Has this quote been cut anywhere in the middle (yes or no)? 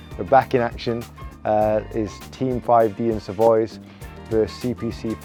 no